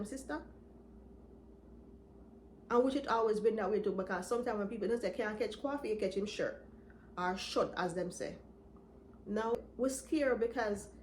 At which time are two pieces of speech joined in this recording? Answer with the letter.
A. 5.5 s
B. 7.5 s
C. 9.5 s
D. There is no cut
C